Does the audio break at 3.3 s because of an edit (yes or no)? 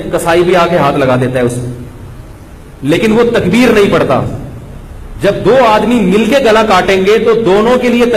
no